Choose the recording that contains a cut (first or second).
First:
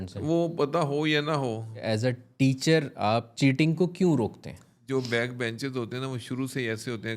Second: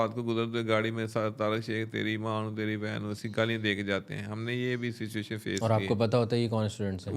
first